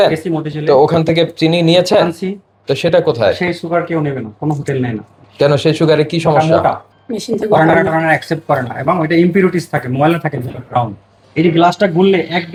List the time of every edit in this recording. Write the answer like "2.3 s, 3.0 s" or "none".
none

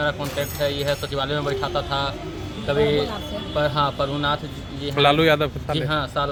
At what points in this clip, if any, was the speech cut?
none

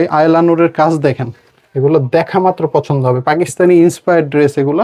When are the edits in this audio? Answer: none

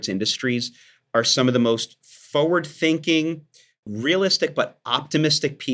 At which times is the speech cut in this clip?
none

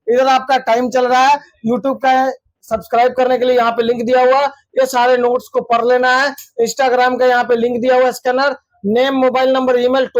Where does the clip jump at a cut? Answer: none

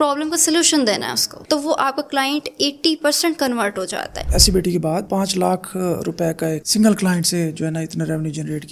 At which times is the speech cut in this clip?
1.3 s, 4.3 s

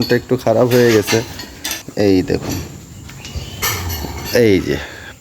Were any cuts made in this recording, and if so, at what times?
1.6 s

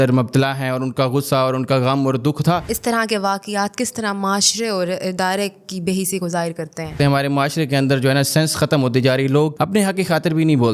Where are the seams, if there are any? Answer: 2.7 s, 7.0 s, 9.5 s

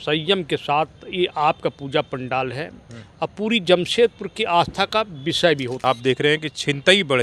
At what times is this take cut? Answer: 5.8 s

